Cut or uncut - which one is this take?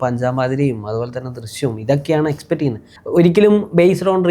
cut